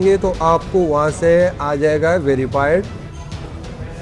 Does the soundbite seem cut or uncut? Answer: uncut